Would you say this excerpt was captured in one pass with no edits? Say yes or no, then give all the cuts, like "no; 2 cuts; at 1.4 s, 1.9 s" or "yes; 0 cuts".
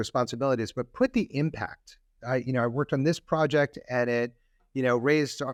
yes; 0 cuts